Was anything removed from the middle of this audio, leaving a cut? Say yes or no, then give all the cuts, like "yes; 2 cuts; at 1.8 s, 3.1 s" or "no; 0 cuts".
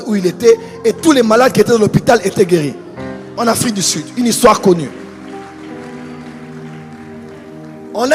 no; 0 cuts